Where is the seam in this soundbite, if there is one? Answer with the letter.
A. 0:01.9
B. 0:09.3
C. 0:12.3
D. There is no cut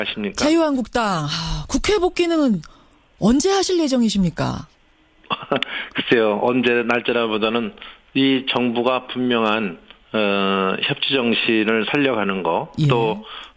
B